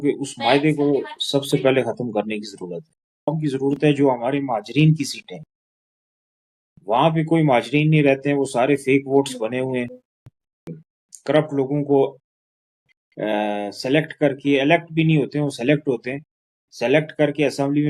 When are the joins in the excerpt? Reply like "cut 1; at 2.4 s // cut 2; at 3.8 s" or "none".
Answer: cut 1; at 3.3 s // cut 2; at 10.7 s